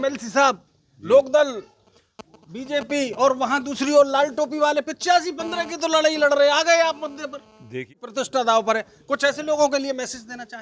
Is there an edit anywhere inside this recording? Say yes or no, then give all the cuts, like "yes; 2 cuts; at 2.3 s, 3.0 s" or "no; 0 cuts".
yes; 1 cut; at 7.9 s